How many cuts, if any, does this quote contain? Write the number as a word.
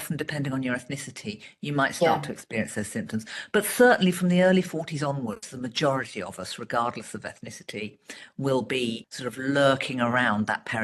one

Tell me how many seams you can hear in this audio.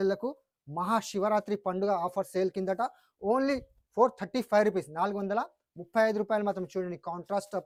zero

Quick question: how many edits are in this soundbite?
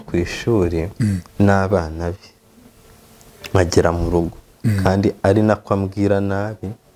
one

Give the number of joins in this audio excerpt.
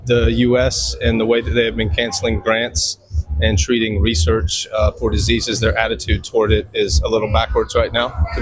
zero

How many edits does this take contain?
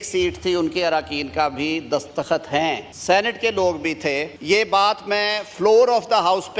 two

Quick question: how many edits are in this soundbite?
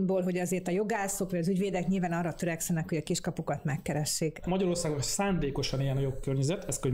one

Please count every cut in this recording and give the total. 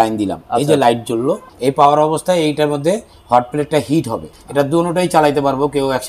two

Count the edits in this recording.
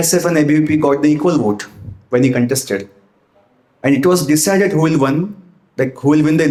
zero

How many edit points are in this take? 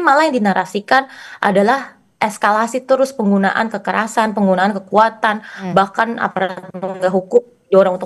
zero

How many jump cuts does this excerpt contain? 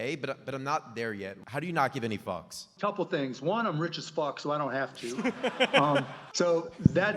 three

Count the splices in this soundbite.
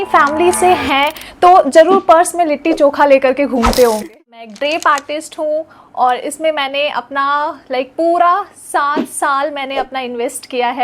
one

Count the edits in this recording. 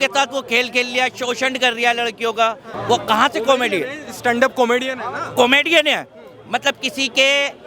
one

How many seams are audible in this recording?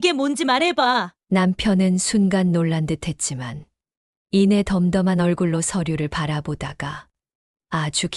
one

